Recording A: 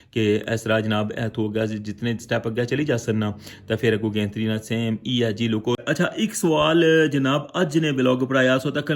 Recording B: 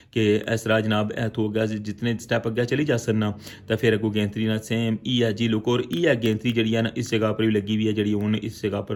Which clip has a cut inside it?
A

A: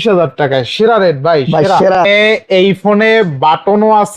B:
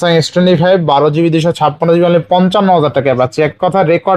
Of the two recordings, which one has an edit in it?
A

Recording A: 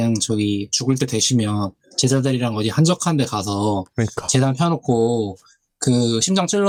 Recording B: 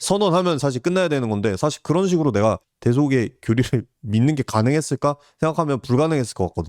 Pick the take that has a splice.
B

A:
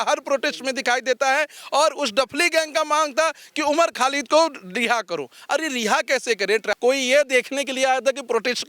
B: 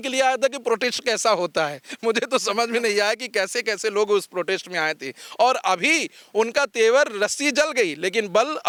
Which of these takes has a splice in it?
A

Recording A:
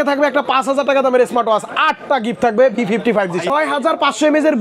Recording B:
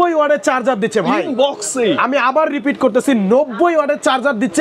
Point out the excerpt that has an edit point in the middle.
A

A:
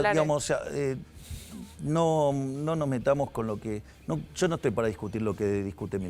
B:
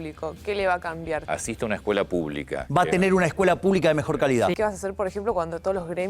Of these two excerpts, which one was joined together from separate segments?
B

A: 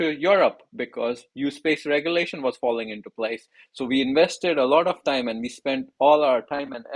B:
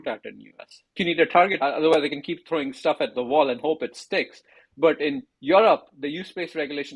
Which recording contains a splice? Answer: B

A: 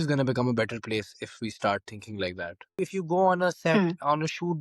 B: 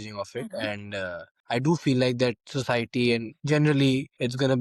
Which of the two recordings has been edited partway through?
A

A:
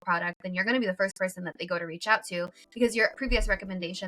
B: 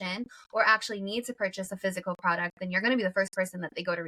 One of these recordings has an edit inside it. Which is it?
A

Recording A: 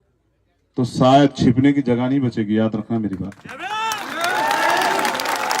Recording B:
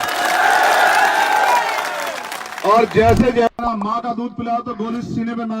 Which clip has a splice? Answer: B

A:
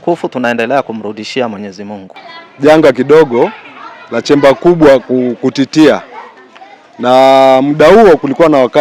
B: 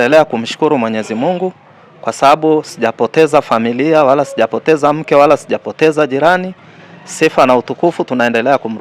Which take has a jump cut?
A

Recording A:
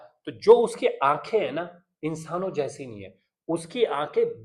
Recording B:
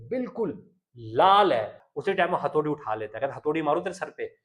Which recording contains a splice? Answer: B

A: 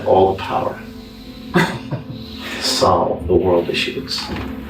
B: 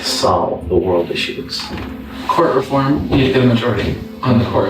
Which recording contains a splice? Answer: B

